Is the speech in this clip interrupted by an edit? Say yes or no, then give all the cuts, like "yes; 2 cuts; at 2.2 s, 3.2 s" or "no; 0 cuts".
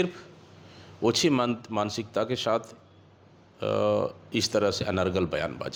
no; 0 cuts